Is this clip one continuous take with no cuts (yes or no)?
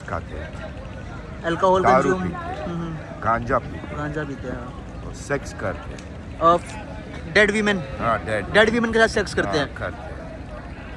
yes